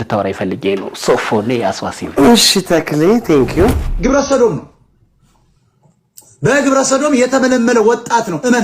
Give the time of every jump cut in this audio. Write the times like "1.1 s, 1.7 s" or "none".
3.9 s